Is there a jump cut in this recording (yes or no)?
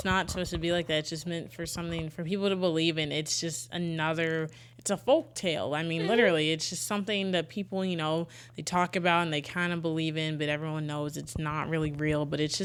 no